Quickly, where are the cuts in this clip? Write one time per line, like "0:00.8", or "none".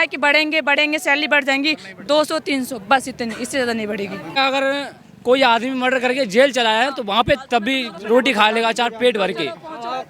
0:04.4